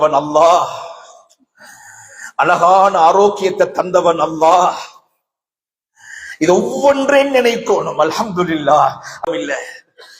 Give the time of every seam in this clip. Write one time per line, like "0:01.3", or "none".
0:09.3